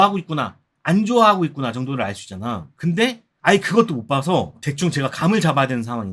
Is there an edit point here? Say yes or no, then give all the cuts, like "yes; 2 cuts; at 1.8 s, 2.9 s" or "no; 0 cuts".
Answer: no; 0 cuts